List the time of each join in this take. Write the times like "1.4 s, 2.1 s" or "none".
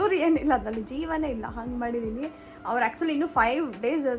none